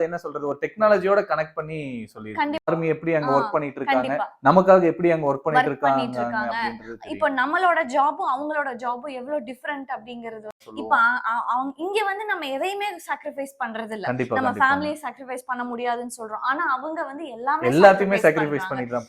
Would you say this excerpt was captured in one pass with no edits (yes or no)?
no